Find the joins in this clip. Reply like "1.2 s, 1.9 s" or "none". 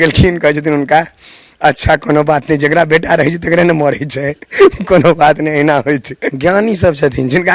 6.4 s

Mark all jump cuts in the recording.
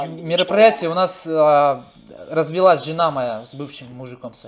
none

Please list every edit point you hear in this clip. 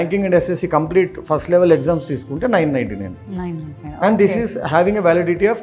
none

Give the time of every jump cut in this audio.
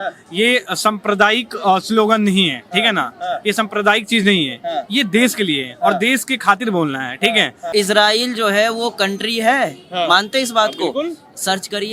7.7 s

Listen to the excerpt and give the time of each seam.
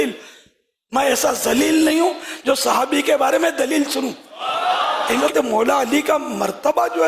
5.2 s

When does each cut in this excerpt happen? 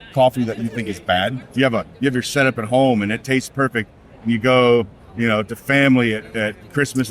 1.4 s

